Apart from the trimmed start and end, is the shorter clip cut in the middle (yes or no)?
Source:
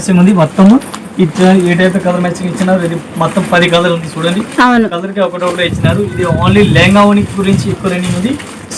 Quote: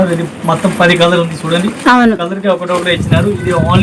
no